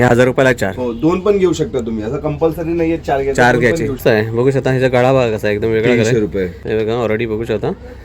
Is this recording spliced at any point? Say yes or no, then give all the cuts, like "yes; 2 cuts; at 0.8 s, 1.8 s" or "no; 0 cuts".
yes; 2 cuts; at 4.0 s, 6.6 s